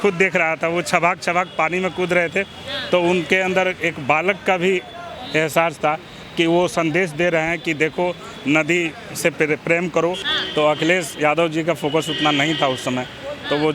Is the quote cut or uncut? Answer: cut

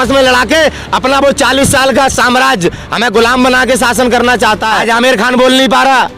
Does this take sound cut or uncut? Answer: cut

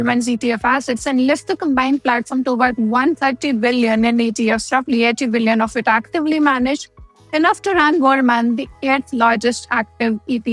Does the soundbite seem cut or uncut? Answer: uncut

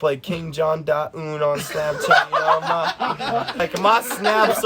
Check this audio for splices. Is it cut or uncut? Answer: cut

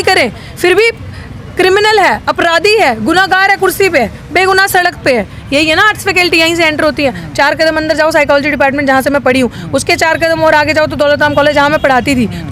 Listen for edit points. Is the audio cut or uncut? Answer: uncut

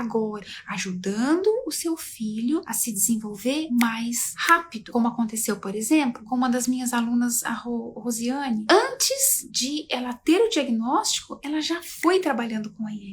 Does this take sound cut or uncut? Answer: cut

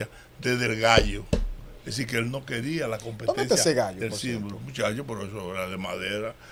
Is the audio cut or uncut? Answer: uncut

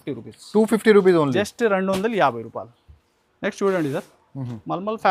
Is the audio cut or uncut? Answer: uncut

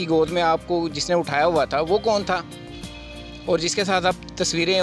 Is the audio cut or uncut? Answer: uncut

